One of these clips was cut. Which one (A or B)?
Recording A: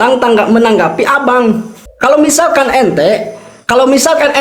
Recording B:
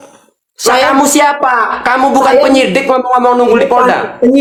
A